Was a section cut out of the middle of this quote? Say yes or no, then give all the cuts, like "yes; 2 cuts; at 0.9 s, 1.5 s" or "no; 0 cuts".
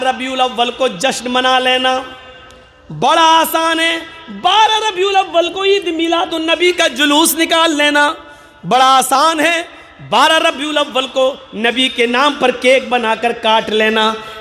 no; 0 cuts